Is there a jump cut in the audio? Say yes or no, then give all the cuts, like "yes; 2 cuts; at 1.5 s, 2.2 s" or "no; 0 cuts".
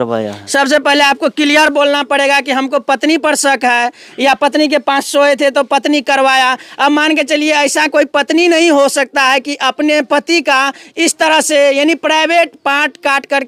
no; 0 cuts